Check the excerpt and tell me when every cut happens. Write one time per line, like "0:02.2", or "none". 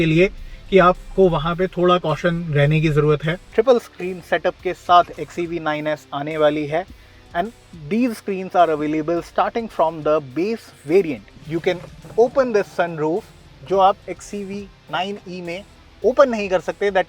0:03.5
0:11.3